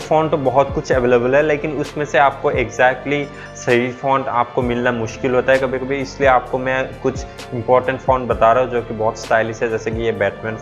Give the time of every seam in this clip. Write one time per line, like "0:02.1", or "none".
none